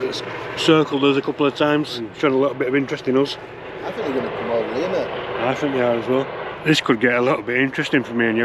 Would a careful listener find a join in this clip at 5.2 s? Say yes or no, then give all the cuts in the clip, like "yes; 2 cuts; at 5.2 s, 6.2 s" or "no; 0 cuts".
no; 3 cuts; at 2.1 s, 3.9 s, 6.4 s